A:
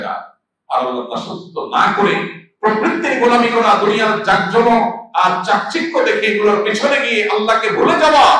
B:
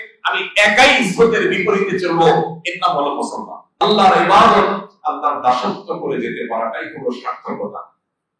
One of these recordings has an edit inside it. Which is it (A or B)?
B